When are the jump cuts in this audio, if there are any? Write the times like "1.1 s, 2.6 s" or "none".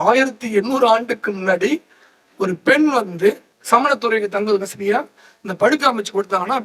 3.5 s